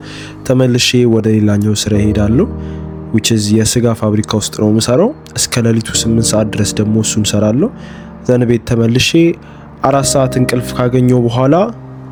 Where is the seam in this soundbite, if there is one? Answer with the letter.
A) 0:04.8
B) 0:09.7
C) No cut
C